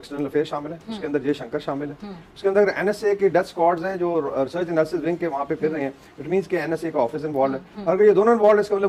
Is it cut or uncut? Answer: uncut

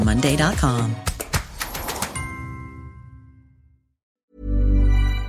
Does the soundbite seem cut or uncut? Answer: cut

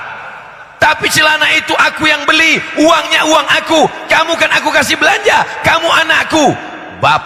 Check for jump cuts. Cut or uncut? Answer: uncut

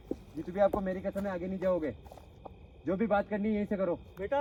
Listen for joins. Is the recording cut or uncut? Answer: uncut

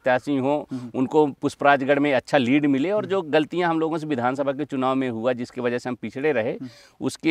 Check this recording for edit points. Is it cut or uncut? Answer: uncut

